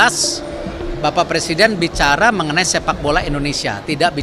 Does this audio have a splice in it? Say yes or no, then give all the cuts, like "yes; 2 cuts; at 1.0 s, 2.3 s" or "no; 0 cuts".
no; 0 cuts